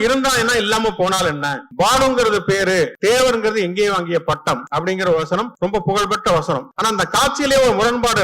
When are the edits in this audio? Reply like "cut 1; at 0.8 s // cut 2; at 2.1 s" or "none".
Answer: cut 1; at 1.6 s // cut 2; at 2.9 s // cut 3; at 4.6 s // cut 4; at 5.5 s // cut 5; at 6.7 s